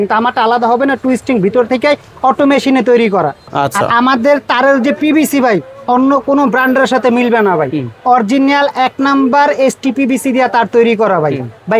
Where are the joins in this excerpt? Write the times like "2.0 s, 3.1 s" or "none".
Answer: 3.4 s